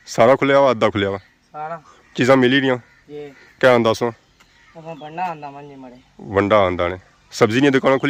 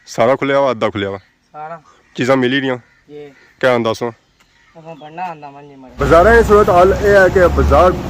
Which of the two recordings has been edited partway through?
second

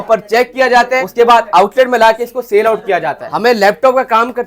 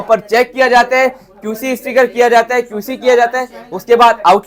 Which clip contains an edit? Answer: first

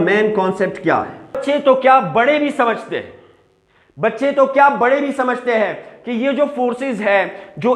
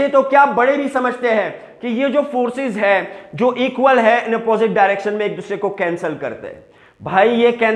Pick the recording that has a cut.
first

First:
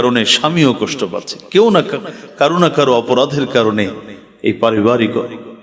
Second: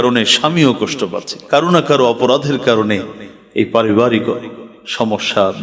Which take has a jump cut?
second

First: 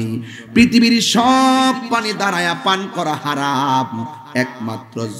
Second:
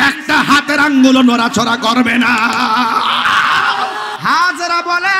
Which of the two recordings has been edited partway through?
second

